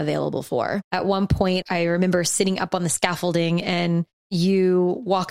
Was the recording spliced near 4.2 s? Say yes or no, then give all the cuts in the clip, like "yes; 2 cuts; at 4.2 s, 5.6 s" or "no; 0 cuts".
yes; 3 cuts; at 0.8 s, 1.6 s, 4.2 s